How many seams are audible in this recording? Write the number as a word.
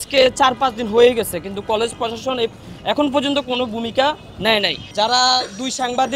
one